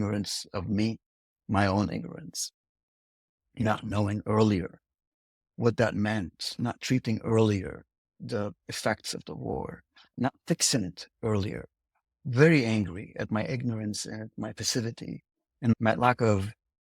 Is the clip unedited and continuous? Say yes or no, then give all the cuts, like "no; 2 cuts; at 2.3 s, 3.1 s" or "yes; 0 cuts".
no; 2 cuts; at 10.1 s, 15.7 s